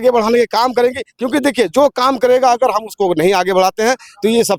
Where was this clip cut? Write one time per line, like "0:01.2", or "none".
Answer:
none